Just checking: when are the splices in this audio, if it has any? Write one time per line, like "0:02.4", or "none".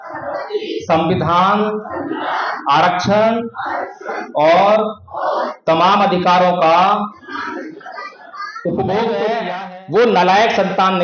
0:09.5